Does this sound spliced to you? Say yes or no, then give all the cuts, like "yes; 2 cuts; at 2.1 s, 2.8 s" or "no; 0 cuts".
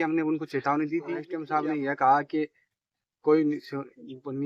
yes; 1 cut; at 1.4 s